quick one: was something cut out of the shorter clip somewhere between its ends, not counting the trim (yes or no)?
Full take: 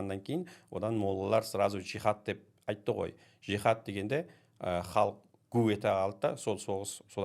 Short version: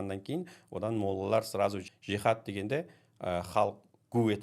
yes